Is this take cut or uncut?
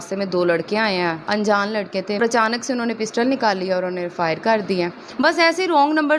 cut